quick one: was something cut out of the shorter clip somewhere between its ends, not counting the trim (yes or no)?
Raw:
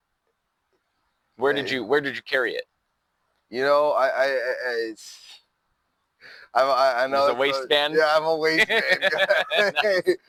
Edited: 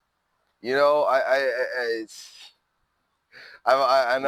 no